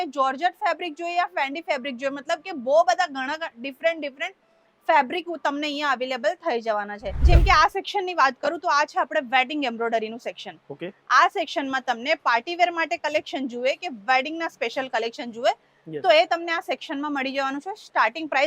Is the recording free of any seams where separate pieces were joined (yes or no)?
no